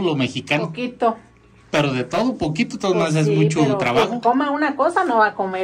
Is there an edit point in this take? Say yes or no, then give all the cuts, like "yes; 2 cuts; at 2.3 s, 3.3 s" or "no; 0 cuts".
no; 0 cuts